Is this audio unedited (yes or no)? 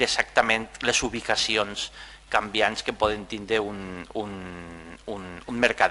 yes